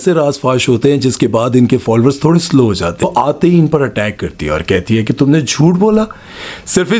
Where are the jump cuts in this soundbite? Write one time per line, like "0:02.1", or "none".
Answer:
0:03.0